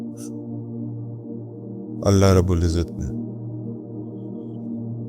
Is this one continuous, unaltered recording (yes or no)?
no